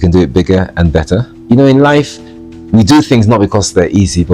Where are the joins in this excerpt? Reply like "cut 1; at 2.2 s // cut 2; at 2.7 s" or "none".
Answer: cut 1; at 1.4 s